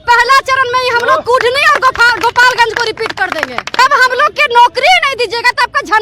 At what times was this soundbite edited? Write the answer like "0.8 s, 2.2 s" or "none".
3.8 s